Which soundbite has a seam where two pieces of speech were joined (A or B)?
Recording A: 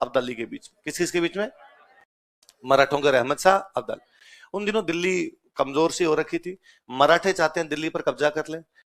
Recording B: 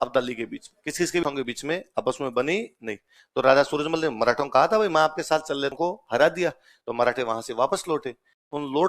B